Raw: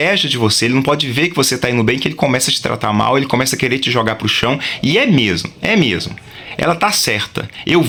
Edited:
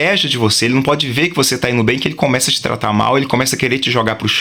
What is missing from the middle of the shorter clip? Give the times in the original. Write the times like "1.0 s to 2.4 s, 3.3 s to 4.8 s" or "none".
none